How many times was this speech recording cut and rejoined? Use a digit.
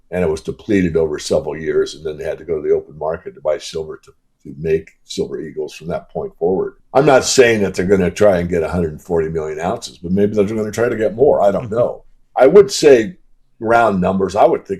1